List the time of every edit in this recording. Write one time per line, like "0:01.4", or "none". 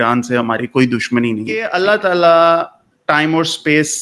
0:01.7